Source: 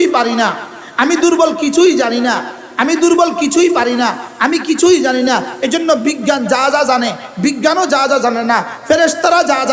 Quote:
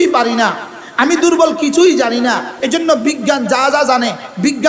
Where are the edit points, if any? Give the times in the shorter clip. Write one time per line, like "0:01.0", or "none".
0:02.5